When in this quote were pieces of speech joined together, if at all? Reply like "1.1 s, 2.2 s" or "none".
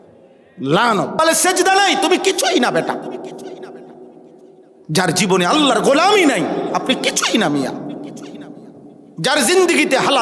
1.2 s